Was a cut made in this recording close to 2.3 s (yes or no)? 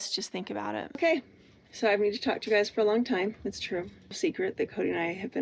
no